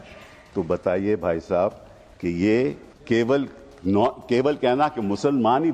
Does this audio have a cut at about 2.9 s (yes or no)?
yes